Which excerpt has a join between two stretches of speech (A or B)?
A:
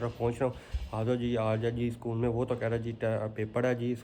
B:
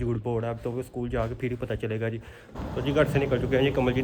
B